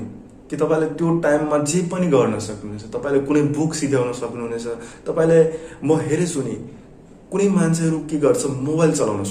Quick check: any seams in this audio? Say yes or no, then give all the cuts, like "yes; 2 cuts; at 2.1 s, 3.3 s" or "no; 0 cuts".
no; 0 cuts